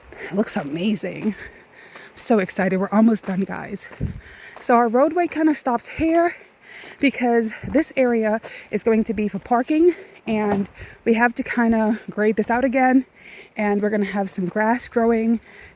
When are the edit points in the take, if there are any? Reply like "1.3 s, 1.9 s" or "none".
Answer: none